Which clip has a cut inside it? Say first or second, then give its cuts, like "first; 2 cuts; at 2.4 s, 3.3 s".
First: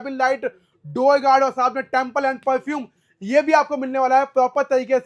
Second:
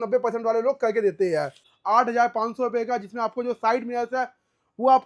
second; 1 cut; at 1.7 s